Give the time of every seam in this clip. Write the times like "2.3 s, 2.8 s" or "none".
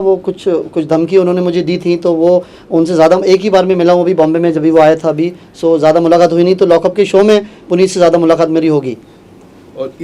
none